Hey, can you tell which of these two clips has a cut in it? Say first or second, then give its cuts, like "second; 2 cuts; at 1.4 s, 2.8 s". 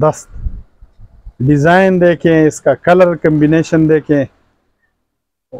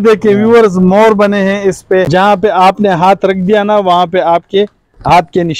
second; 1 cut; at 2.1 s